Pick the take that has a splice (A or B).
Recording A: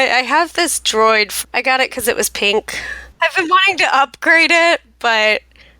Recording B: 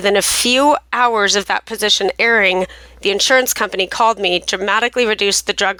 A